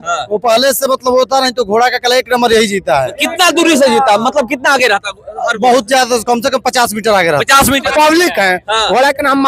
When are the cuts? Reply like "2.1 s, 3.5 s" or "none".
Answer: 7.9 s